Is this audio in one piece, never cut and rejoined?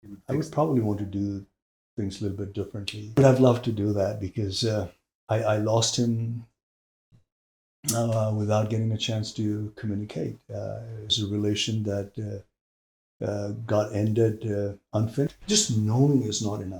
no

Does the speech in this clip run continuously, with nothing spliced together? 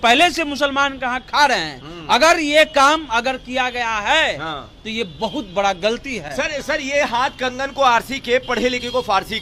yes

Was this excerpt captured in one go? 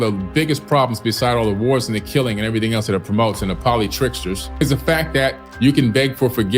no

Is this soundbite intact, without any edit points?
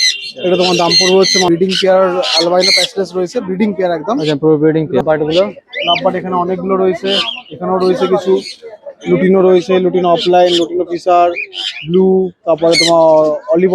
no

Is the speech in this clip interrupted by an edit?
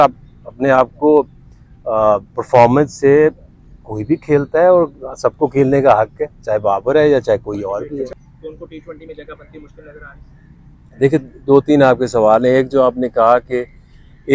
yes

